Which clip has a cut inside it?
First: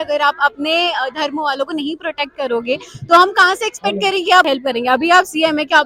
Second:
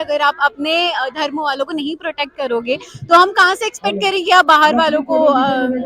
first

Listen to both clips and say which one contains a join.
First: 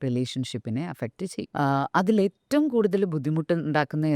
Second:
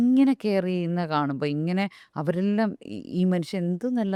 first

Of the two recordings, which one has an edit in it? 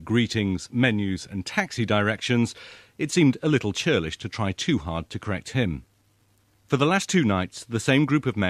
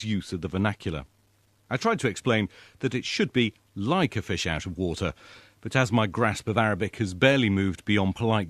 second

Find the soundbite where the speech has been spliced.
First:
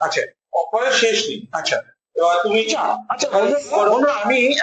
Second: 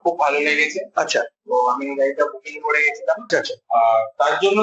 second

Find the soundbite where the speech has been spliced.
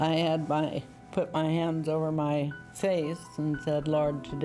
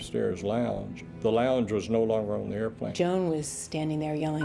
second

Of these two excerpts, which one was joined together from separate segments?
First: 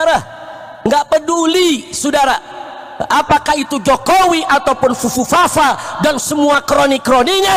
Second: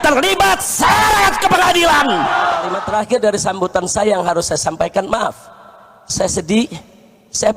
second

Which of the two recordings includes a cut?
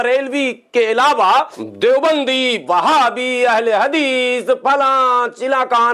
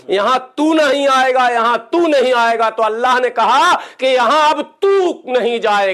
first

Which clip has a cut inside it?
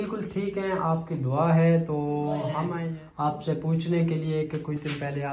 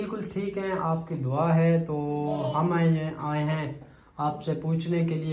first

